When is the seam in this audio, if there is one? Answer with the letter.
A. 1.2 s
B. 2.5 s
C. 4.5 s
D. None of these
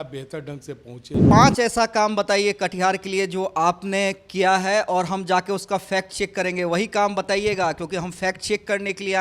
A